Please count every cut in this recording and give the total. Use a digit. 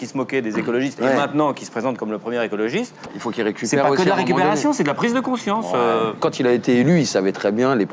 1